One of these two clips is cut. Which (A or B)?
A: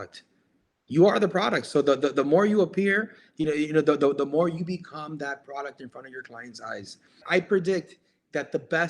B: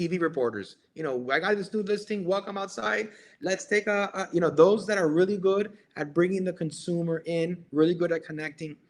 A